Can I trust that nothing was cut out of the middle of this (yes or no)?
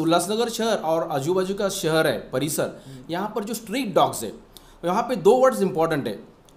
yes